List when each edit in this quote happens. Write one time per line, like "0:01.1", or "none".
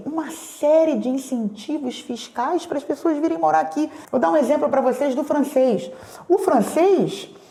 none

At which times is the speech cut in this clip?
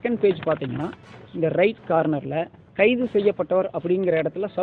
0:02.6

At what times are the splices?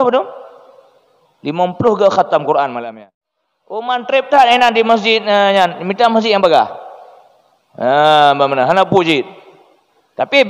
0:02.8

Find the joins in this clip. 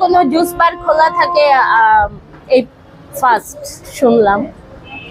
none

